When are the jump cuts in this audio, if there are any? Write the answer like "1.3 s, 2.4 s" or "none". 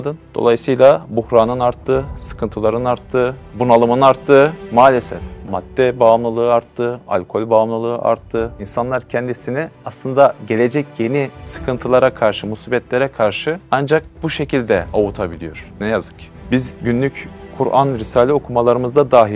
16.2 s